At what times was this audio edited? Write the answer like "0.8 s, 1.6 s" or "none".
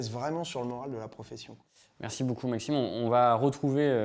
none